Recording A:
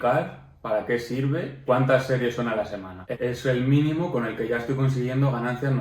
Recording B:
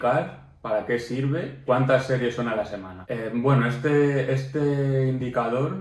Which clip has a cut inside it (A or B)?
A